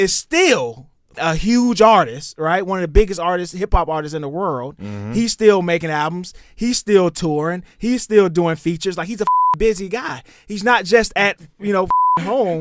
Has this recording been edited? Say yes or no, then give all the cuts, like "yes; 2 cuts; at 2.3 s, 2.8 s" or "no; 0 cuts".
yes; 1 cut; at 1.1 s